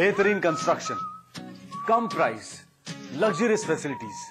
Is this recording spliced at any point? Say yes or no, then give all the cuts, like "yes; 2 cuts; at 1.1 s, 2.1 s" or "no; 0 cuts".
no; 0 cuts